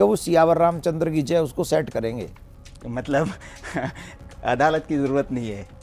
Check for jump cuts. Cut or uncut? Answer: uncut